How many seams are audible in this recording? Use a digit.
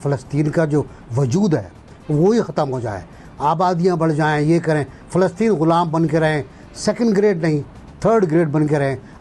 0